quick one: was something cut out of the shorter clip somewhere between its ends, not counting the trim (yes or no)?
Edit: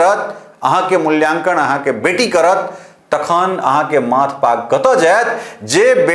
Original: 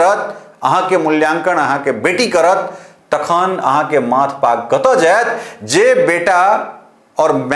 no